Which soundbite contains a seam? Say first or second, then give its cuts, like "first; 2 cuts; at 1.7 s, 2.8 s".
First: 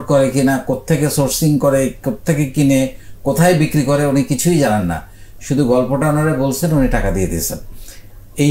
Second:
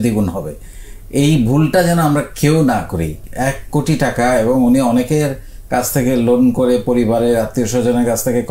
second; 1 cut; at 3.3 s